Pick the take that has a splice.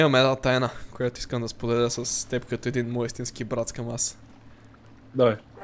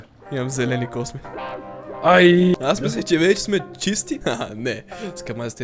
second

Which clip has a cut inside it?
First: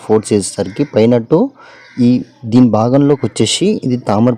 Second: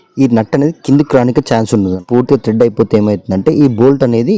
second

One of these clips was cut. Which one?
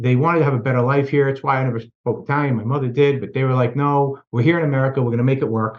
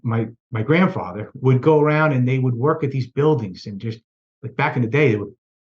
second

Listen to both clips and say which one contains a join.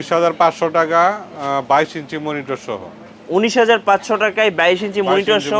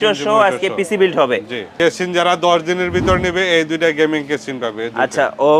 second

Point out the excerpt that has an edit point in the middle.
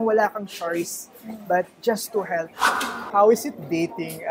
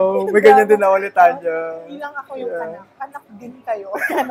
first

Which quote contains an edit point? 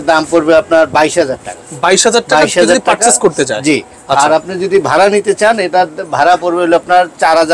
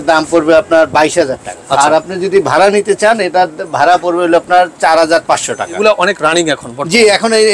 second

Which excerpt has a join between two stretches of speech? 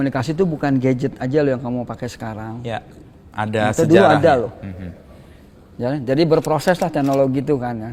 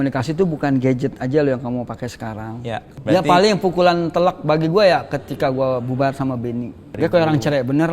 second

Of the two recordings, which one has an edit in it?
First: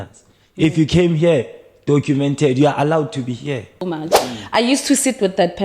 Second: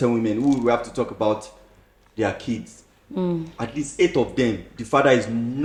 first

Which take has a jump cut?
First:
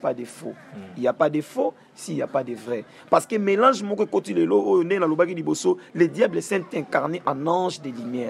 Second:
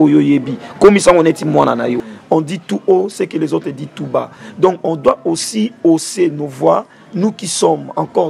second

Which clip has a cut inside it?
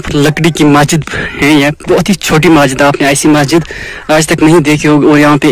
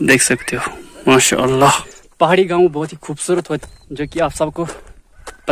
second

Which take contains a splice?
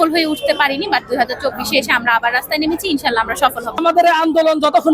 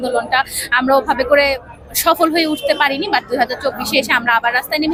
first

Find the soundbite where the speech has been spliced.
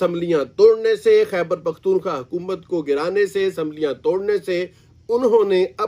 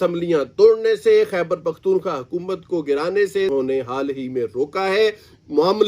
second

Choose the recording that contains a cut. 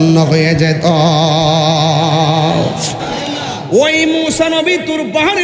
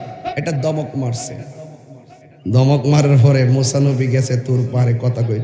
first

